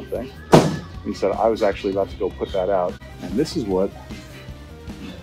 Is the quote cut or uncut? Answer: cut